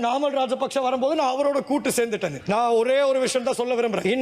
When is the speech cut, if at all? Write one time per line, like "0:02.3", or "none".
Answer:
none